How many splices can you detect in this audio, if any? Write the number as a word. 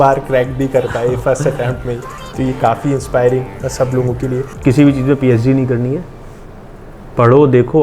one